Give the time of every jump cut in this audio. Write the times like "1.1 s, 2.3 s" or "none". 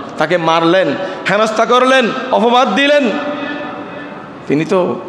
none